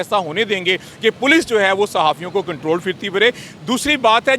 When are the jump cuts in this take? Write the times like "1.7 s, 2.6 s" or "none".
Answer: none